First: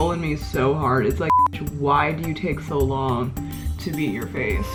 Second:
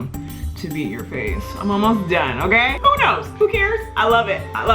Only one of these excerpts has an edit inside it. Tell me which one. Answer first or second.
second